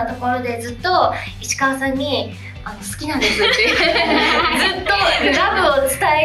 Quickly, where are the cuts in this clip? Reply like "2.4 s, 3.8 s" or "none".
none

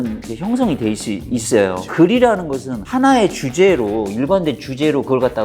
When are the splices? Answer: 1.9 s

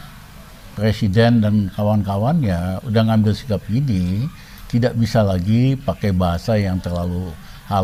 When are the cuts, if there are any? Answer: none

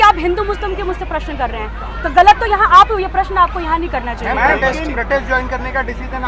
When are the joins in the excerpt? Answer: none

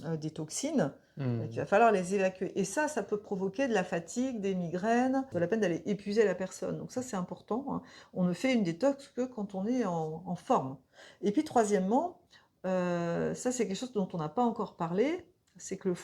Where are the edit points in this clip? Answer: 5.3 s

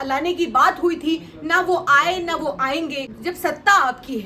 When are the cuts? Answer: 3.1 s

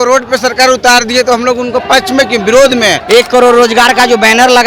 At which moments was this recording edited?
3.0 s

